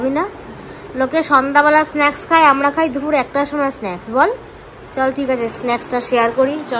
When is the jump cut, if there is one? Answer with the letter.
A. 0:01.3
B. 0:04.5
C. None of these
C